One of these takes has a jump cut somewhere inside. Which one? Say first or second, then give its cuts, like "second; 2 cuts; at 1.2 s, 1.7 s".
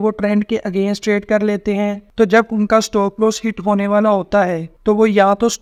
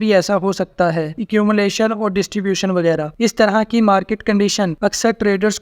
second; 3 cuts; at 1.2 s, 3.1 s, 4.7 s